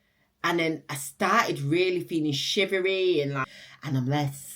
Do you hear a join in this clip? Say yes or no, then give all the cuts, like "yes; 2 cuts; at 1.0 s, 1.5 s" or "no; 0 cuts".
yes; 1 cut; at 3.4 s